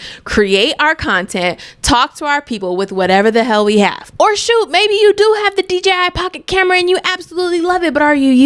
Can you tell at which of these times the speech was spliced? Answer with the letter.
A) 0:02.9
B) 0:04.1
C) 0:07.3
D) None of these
B